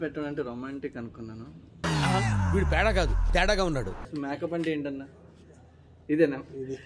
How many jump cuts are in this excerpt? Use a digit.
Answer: 1